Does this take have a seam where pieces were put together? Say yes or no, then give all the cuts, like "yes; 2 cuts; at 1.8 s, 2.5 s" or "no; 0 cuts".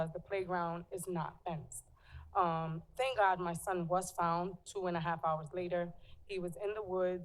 no; 0 cuts